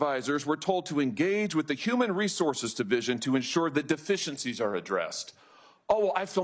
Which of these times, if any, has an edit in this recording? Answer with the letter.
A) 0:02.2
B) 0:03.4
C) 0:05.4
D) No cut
D